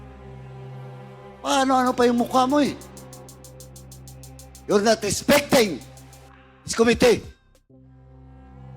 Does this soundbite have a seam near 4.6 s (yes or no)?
yes